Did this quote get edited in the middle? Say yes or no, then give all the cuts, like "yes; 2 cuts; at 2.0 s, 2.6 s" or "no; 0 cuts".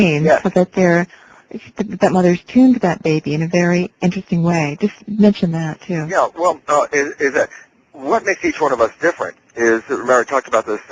no; 0 cuts